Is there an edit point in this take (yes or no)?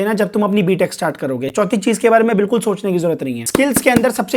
yes